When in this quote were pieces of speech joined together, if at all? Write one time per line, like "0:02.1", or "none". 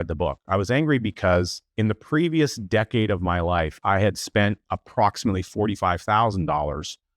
0:01.6